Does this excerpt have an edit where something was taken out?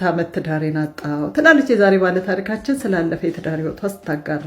no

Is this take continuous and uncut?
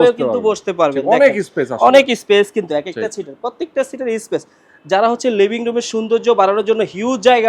yes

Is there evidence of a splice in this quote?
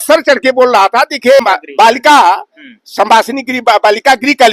yes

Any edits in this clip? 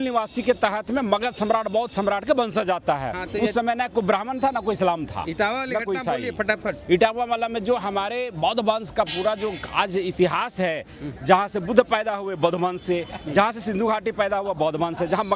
no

